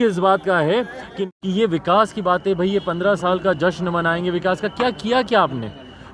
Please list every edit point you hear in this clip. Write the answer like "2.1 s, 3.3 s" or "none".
1.1 s

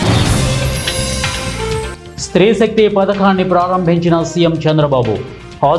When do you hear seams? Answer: 2.0 s

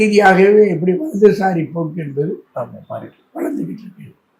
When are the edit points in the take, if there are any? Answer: none

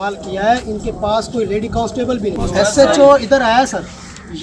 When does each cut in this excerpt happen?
2.3 s

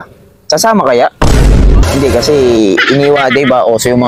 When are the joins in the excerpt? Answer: 1.8 s

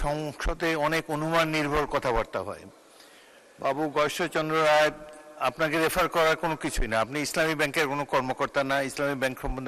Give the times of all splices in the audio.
none

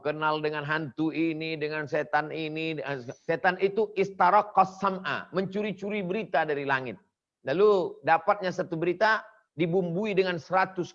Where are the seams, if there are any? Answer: 3.1 s

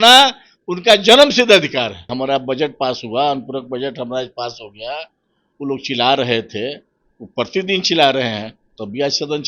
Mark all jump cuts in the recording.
2.1 s

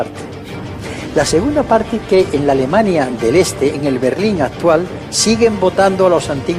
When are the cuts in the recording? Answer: none

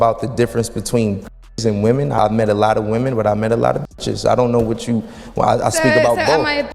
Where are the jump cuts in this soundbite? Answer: 2.2 s

